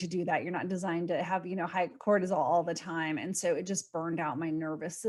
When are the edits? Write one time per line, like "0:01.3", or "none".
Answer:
none